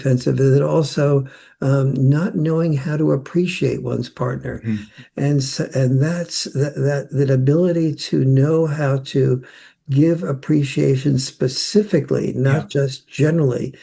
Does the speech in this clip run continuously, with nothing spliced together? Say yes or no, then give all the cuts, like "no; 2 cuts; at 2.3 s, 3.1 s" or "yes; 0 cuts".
no; 1 cut; at 4.9 s